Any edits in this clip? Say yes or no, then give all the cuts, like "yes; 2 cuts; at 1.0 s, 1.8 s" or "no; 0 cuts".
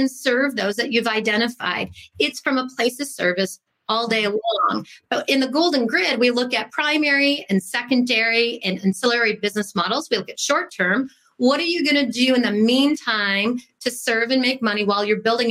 no; 0 cuts